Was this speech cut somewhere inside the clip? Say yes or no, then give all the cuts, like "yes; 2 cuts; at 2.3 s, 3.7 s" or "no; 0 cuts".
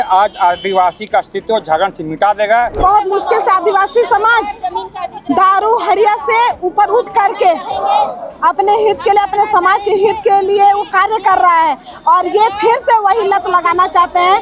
yes; 1 cut; at 2.8 s